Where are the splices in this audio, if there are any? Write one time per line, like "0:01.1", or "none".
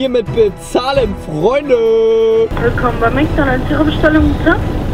0:02.5